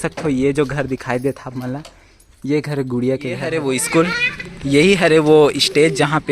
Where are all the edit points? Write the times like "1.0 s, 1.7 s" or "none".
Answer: 3.3 s